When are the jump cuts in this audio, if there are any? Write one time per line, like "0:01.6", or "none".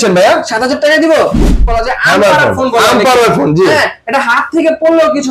0:01.7

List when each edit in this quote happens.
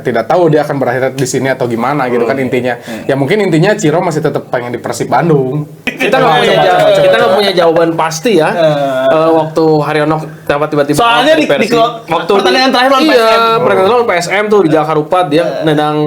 0:05.9

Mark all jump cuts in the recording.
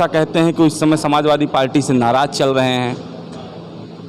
none

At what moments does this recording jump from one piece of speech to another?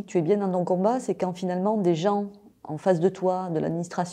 none

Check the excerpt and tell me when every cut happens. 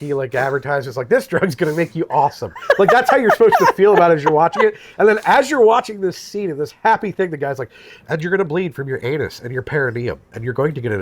none

